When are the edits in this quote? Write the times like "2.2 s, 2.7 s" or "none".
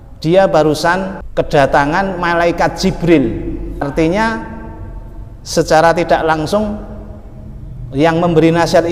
1.2 s, 3.8 s